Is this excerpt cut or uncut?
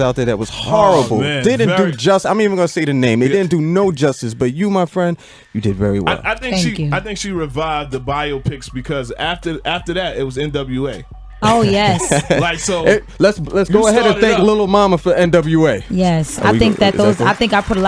cut